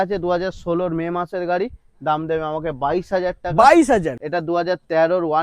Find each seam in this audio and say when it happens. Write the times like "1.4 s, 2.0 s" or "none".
4.2 s